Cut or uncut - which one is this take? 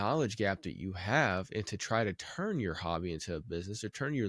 uncut